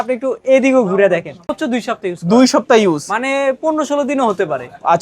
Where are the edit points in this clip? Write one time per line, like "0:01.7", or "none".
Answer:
0:01.5

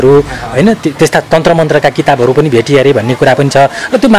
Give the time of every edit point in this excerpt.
none

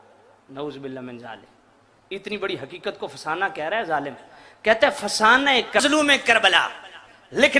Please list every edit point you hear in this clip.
0:05.8

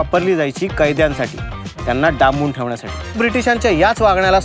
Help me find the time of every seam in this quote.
0:03.2

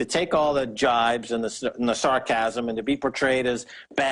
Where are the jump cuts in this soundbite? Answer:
0:01.6

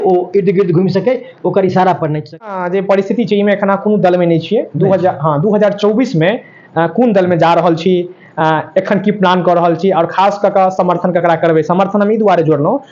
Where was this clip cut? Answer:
0:02.6

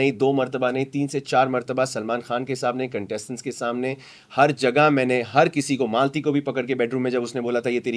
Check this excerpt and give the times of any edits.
none

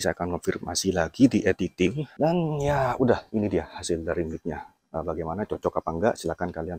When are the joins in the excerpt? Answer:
0:02.0

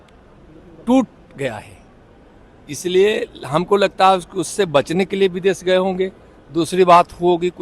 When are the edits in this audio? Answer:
none

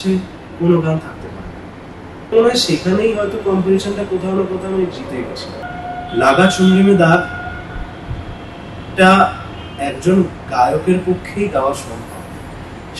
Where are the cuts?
0:02.3
0:05.6

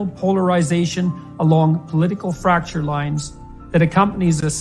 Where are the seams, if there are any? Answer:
none

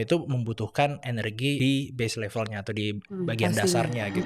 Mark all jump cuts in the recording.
0:01.6

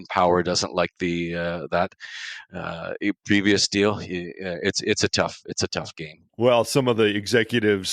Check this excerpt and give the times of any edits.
0:06.2

